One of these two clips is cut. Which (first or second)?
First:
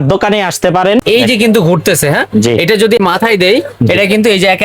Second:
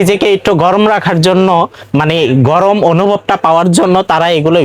first